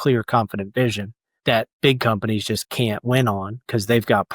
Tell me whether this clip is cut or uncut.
cut